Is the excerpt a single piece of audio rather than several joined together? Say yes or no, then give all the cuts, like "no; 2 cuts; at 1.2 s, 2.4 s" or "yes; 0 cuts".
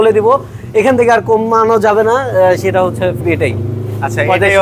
no; 1 cut; at 3.2 s